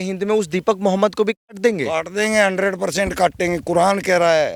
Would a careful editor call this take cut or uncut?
uncut